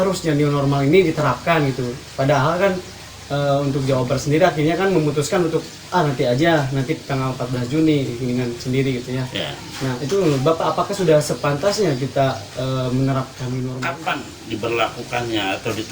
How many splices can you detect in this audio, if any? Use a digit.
1